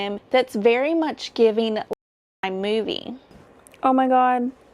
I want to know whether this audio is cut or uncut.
cut